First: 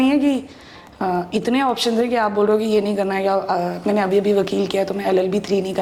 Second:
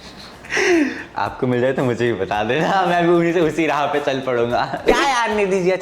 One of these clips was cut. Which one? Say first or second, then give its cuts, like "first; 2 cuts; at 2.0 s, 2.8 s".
second; 1 cut; at 4.8 s